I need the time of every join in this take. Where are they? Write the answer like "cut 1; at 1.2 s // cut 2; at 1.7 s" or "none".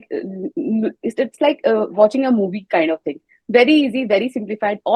none